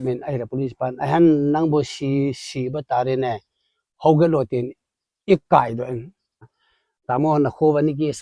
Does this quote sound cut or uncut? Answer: cut